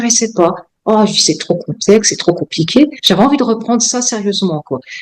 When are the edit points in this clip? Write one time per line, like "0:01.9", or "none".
0:03.0